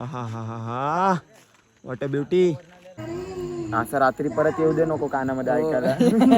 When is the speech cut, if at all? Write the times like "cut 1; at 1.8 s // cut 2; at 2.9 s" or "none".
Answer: cut 1; at 3.0 s